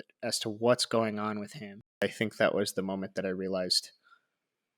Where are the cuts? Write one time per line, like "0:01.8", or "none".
0:02.0